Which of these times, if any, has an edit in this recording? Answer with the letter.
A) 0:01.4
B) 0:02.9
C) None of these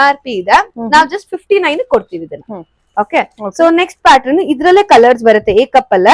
C